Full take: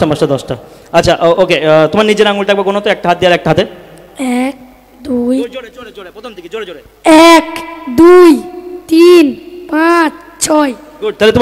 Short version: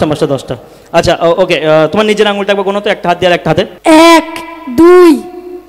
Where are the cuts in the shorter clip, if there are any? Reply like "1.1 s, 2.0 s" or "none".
3.7 s